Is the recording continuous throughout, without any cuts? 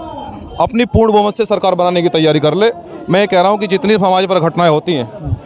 yes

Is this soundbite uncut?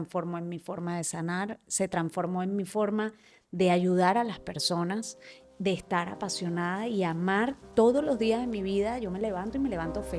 yes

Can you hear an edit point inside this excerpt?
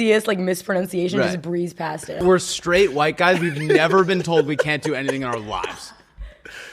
yes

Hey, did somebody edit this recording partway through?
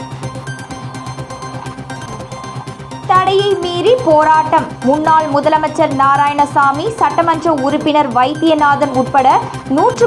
yes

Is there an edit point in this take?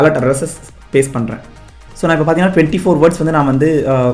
yes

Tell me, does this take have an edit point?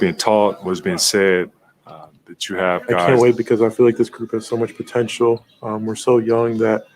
yes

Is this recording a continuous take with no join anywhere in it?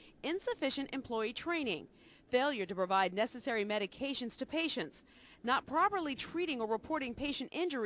no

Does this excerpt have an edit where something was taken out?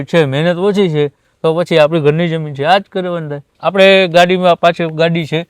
yes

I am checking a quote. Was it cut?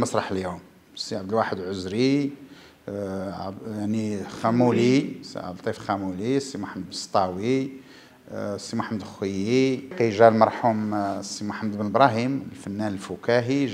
yes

